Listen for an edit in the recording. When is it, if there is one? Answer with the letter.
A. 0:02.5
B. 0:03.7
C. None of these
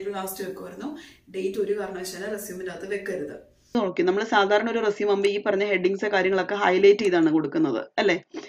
B